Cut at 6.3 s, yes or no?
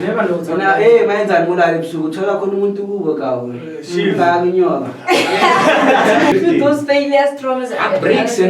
yes